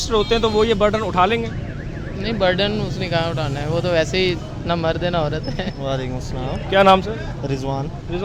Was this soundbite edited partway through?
no; 0 cuts

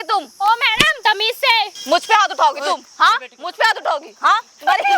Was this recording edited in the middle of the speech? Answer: yes; 2 cuts; at 0.9 s, 1.8 s

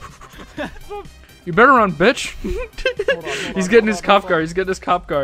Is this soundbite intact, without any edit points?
yes; 0 cuts

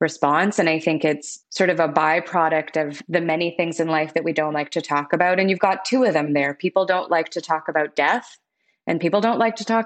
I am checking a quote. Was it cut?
yes; 2 cuts; at 1.3 s, 3.0 s

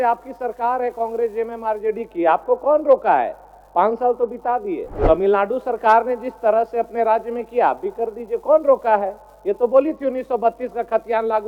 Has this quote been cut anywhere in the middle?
yes; 1 cut; at 4.9 s

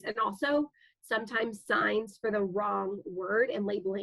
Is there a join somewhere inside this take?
no; 0 cuts

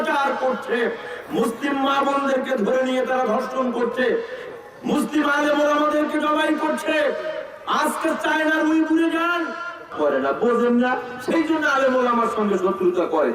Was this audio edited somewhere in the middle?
yes; 1 cut; at 9.9 s

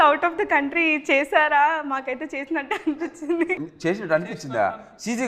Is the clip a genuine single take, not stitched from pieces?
no; 1 cut; at 3.7 s

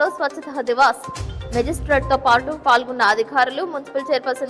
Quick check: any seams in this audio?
no; 0 cuts

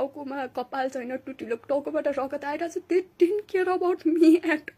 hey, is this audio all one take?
yes; 0 cuts

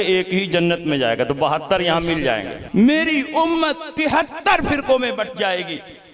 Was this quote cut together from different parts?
yes; 1 cut; at 2.6 s

